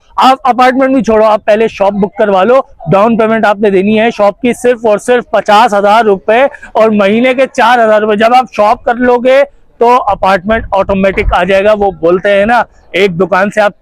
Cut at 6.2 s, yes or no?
no